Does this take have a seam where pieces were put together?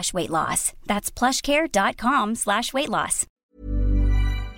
yes; 1 cut; at 3.4 s

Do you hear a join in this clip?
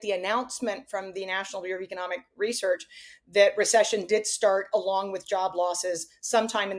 no; 0 cuts

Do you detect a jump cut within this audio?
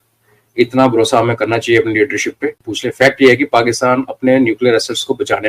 yes; 1 cut; at 2.7 s

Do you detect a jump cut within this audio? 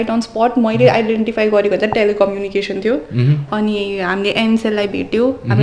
no; 0 cuts

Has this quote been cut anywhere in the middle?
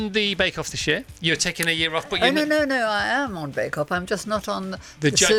no; 0 cuts

